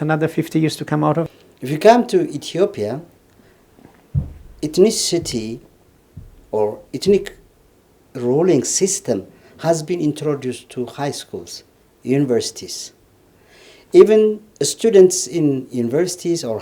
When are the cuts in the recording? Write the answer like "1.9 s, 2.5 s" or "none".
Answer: 1.3 s